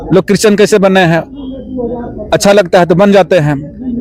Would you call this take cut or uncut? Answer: uncut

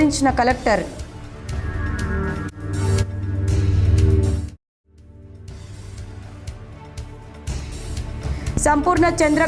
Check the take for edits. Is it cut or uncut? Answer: uncut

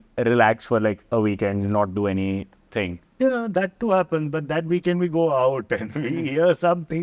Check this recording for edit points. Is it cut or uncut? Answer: uncut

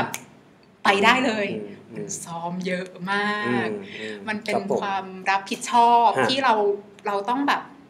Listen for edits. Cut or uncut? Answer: uncut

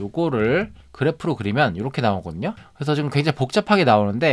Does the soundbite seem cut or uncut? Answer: uncut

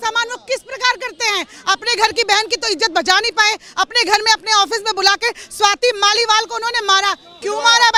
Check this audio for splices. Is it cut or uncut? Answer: uncut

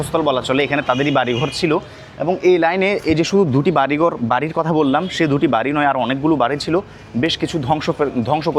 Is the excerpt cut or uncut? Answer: uncut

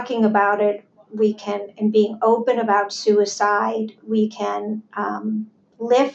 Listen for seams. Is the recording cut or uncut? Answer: uncut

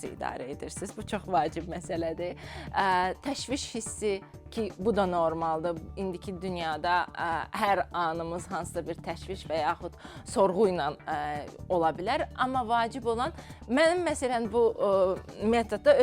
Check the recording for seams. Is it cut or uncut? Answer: uncut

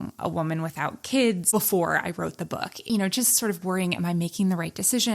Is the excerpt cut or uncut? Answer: cut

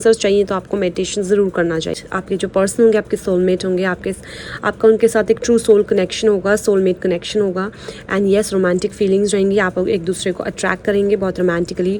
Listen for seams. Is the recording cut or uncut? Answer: cut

